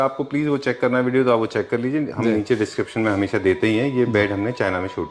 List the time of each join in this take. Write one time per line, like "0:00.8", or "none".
none